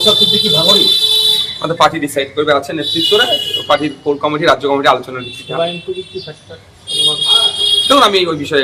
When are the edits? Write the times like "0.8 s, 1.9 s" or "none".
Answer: none